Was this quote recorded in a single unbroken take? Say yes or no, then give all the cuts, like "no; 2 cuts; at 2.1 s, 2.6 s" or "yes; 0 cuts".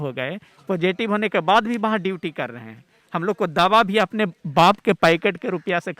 yes; 0 cuts